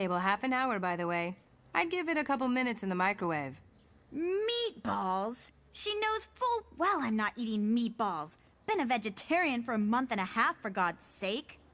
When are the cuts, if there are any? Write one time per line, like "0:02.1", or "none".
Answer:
none